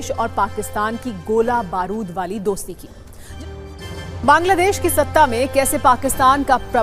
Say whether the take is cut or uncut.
cut